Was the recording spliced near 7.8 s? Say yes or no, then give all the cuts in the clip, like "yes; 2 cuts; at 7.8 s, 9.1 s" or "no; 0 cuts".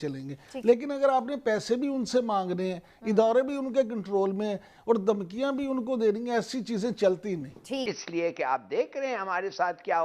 yes; 1 cut; at 7.8 s